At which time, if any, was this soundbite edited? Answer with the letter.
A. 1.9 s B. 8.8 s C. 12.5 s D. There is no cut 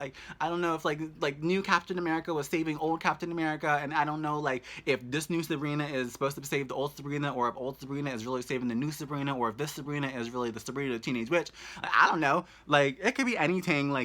D